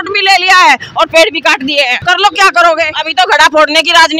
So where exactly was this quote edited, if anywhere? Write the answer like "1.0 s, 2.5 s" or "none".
2.0 s, 3.0 s

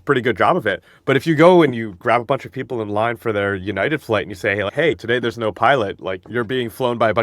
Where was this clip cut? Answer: 4.8 s, 6.2 s

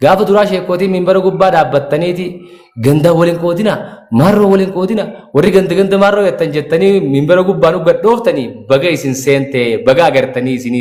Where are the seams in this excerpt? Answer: none

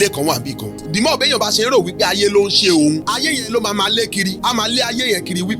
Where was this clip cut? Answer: 0.8 s, 3.0 s, 4.4 s

